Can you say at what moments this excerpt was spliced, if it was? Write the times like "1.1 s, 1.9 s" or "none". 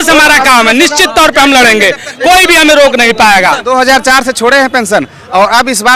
3.6 s